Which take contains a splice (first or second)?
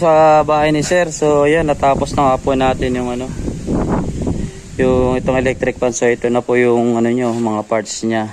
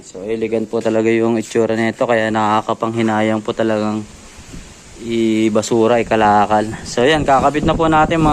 second